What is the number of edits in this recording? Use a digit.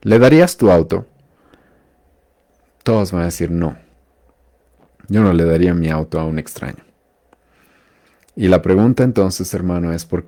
0